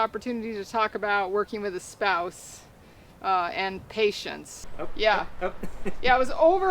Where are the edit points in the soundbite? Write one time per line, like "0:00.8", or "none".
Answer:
0:04.5